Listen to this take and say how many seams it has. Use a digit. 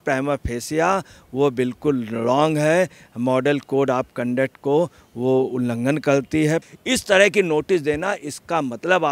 1